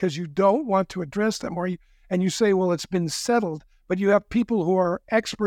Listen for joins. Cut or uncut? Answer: uncut